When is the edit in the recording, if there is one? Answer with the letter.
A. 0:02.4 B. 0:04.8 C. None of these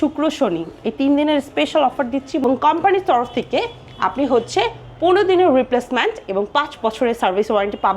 A